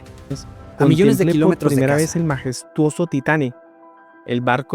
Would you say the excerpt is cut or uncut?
cut